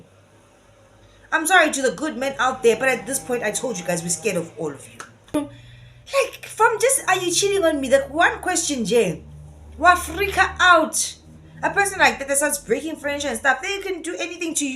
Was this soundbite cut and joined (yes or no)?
yes